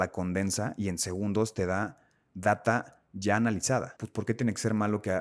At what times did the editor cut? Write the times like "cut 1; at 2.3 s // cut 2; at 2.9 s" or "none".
cut 1; at 4.0 s